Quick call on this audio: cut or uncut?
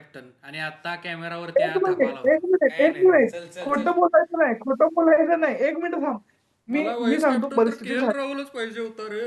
uncut